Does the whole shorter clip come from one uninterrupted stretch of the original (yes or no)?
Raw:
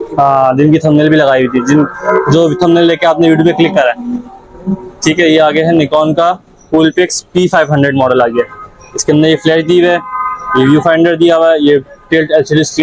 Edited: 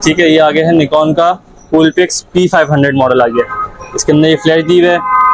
yes